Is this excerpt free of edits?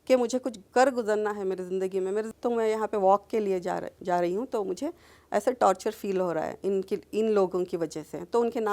no; 1 cut; at 2.3 s

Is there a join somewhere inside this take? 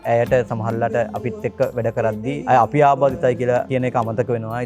yes; 2 cuts; at 2.4 s, 3.7 s

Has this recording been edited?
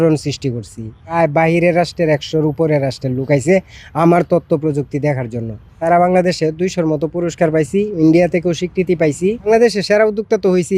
yes; 3 cuts; at 1.1 s, 5.8 s, 9.5 s

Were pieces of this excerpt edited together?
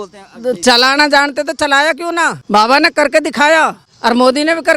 yes; 2 cuts; at 2.4 s, 3.9 s

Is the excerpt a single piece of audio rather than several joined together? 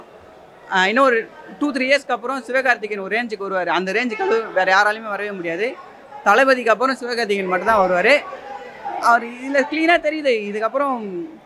yes; 0 cuts

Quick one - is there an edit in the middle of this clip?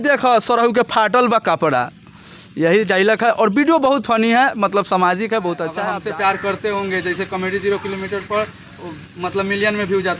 yes; 1 cut; at 5.8 s

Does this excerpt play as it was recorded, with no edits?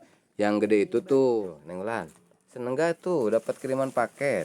no; 1 cut; at 1.3 s

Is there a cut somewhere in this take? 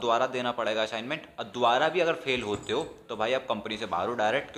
no; 0 cuts

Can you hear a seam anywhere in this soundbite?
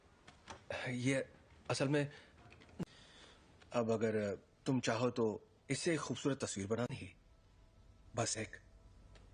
no; 0 cuts

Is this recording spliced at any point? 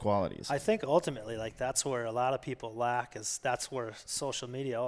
no; 0 cuts

